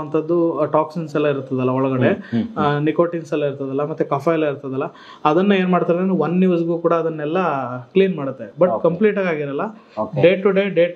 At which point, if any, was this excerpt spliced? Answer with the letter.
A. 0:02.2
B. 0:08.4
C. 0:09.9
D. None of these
D